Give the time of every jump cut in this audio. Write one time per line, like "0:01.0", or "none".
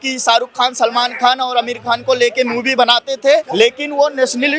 0:03.5